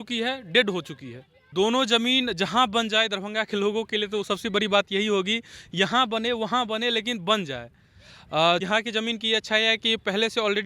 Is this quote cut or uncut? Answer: cut